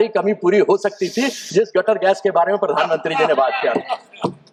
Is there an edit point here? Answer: no; 0 cuts

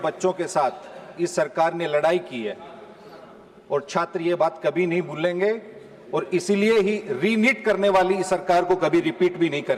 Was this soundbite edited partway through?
no; 0 cuts

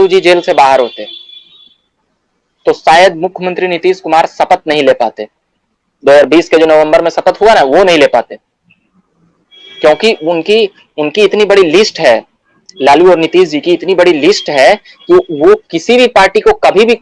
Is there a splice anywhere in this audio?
no; 0 cuts

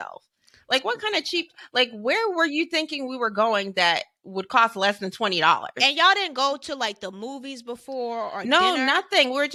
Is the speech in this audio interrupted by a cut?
no; 0 cuts

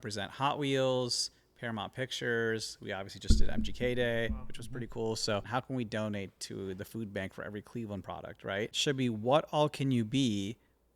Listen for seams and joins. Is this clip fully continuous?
no; 2 cuts; at 5.5 s, 8.7 s

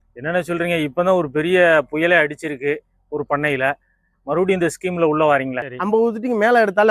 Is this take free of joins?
no; 1 cut; at 5.6 s

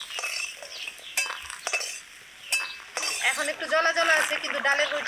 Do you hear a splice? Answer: yes; 1 cut; at 3.1 s

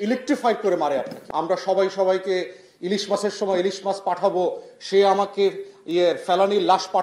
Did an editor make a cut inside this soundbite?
yes; 1 cut; at 1.2 s

